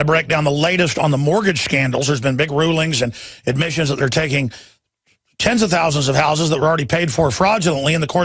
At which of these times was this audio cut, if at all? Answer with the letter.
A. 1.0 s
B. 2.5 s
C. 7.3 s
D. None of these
C